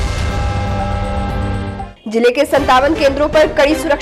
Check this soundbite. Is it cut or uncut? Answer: uncut